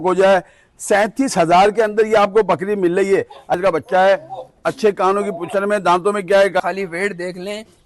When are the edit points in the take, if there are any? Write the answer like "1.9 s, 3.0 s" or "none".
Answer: 3.6 s, 6.6 s